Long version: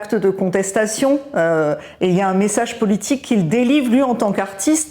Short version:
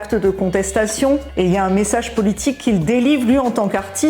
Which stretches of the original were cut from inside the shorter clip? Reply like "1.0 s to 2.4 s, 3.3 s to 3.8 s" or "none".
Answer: 1.3 s to 1.9 s

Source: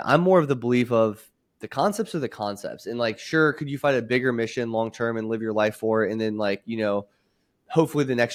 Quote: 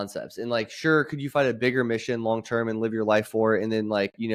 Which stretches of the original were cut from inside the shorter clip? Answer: none

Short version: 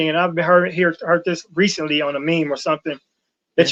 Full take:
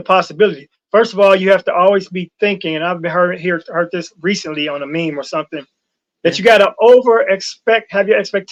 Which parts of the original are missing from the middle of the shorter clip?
none

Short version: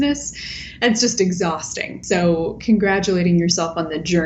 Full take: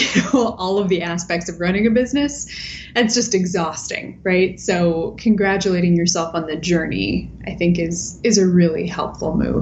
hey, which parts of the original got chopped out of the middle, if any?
4.1 s to 4.6 s

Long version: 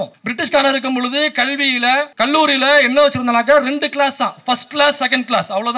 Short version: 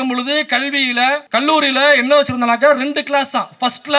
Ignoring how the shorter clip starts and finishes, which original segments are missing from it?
none

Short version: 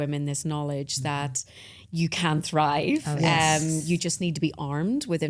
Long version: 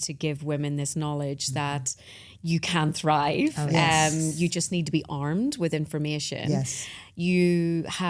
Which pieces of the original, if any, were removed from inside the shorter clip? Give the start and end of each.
none

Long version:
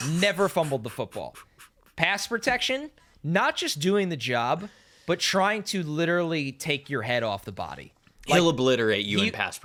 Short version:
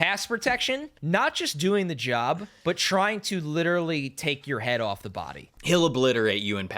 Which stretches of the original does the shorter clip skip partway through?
2.9 s to 3.1 s, 4.7 s to 4.9 s, 8.1 s to 8.3 s

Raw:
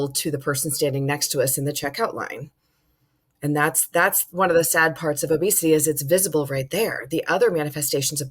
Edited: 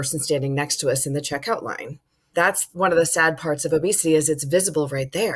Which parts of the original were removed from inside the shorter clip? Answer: 2.7 s to 3.8 s

